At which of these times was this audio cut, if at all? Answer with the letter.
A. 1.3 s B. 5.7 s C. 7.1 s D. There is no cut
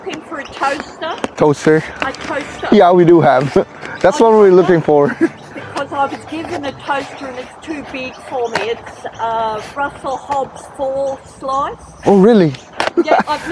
A